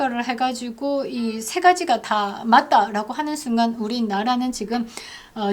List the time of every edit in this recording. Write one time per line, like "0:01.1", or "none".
none